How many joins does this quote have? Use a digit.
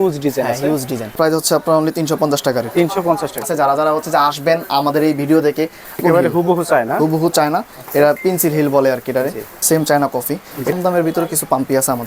5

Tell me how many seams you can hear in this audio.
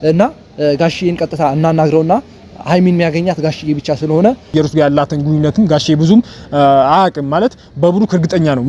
1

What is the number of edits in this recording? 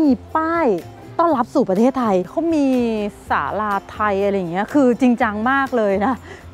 1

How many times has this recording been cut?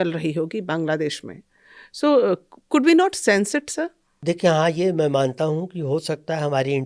1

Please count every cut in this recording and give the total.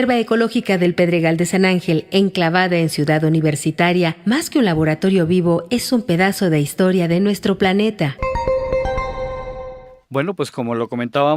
1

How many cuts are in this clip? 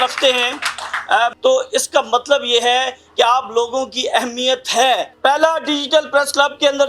2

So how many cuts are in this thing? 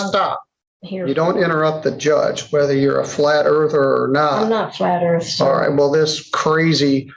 0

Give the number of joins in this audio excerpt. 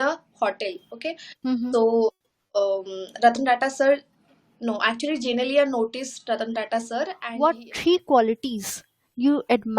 1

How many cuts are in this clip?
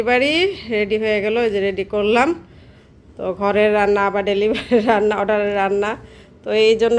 0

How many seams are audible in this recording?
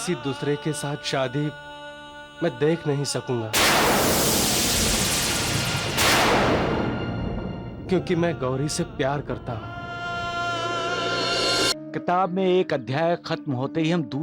1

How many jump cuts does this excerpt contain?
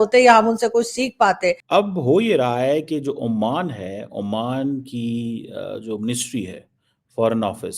1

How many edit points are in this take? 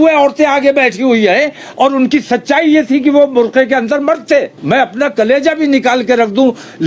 1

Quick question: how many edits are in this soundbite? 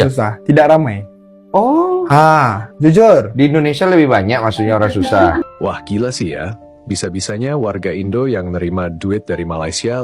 1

